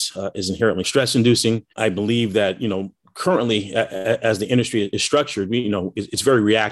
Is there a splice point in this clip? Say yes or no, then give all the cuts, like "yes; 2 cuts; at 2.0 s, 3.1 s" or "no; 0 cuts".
yes; 2 cuts; at 0.9 s, 4.9 s